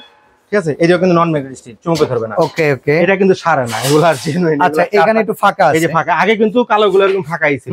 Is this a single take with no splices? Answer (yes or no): yes